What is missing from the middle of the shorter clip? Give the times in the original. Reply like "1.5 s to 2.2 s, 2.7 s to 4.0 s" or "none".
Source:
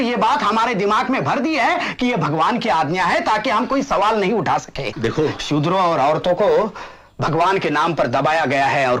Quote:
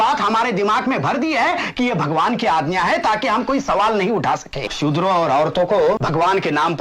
4.9 s to 5.4 s, 6.7 s to 7.2 s